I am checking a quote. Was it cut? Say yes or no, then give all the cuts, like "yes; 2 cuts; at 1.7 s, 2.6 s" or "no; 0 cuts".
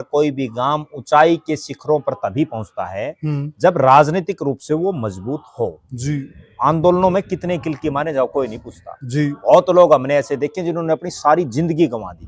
no; 0 cuts